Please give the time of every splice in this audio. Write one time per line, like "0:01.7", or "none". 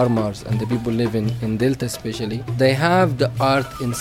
0:02.4